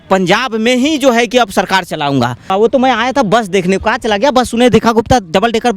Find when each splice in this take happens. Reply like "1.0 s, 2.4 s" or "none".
2.5 s